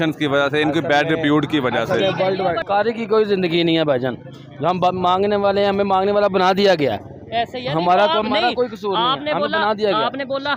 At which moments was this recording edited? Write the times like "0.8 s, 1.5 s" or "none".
2.6 s